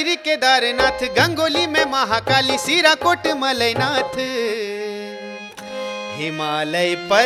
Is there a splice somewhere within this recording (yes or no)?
no